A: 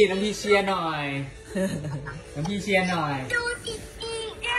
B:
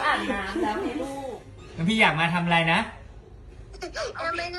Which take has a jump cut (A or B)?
B